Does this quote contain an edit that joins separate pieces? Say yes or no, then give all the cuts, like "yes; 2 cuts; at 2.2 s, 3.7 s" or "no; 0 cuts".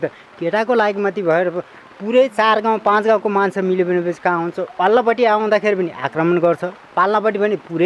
no; 0 cuts